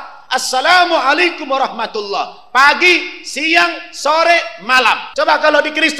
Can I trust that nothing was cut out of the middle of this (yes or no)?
no